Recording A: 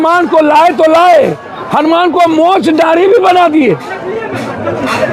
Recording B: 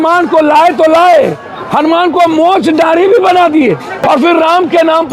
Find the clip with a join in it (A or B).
B